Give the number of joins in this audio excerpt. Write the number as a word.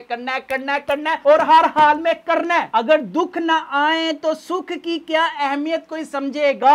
one